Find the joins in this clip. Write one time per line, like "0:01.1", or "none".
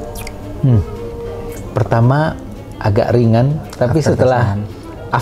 0:01.5